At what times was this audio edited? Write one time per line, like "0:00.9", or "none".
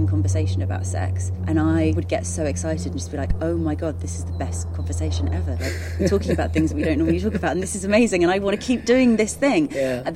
0:01.3
0:01.9